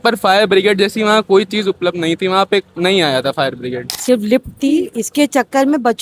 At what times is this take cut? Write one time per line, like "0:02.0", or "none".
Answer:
0:03.9